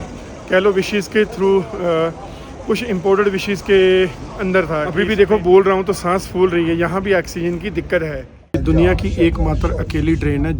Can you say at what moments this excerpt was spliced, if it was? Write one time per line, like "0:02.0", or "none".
0:04.9
0:08.5

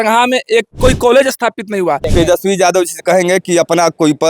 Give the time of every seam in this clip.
0:00.8
0:02.1

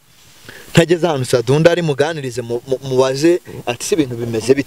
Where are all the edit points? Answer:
none

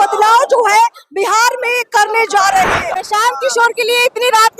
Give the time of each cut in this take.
0:02.9

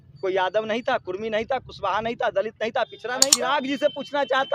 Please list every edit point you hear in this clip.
0:03.3

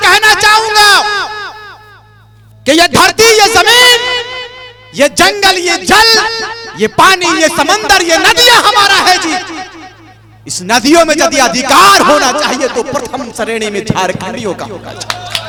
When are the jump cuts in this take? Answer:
none

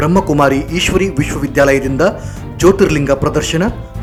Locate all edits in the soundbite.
none

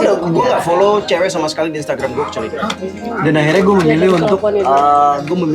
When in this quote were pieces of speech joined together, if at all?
0:03.0

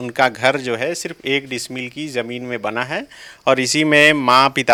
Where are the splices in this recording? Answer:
none

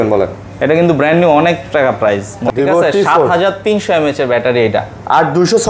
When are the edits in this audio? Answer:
0:02.4

